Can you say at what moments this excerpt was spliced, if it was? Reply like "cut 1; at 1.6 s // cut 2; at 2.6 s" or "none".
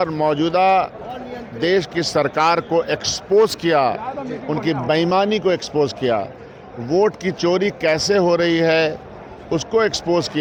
none